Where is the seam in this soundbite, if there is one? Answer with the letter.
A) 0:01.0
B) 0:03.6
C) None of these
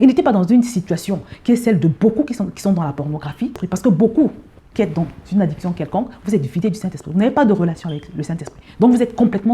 B